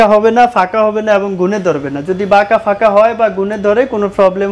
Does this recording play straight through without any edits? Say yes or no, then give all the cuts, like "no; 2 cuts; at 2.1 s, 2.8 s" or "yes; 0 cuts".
yes; 0 cuts